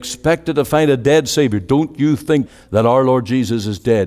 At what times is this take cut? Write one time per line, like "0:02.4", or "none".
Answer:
0:02.5

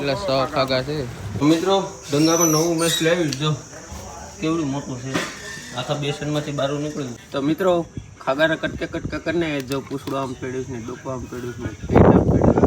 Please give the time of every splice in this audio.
0:01.3
0:07.2

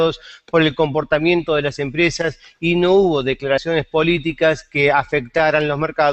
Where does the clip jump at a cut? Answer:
0:02.1

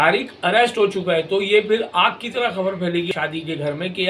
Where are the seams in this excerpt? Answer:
0:03.1

